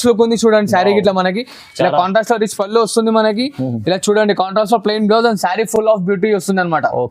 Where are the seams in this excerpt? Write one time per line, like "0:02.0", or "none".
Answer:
none